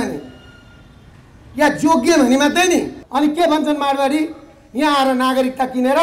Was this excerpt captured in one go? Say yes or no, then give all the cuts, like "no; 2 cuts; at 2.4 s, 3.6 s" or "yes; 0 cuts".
no; 1 cut; at 3.0 s